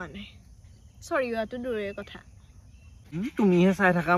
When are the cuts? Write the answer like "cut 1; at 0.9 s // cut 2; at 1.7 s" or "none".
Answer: cut 1; at 3.0 s

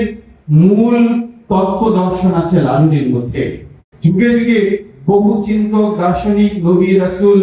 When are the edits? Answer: cut 1; at 3.9 s

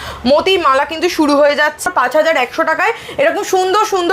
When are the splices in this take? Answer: cut 1; at 1.8 s

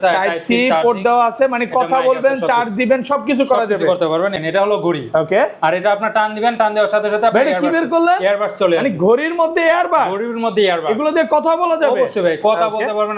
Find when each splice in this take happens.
cut 1; at 4.3 s

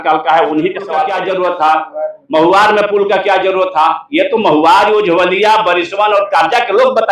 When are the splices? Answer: cut 1; at 1.1 s

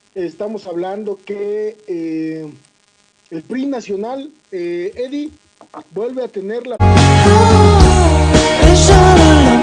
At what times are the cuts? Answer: none

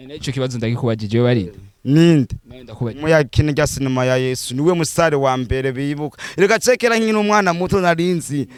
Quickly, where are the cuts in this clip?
none

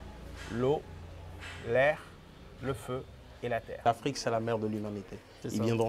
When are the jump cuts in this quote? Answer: cut 1; at 3.8 s

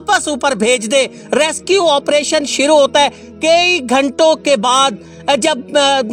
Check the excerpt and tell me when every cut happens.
none

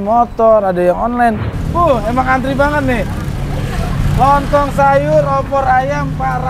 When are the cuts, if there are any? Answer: cut 1; at 1.5 s

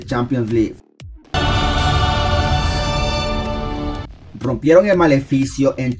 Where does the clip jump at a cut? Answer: cut 1; at 0.9 s // cut 2; at 4.1 s

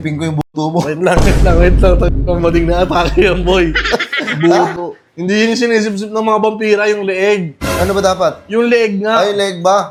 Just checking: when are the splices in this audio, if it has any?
none

